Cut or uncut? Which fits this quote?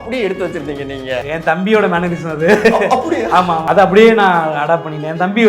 cut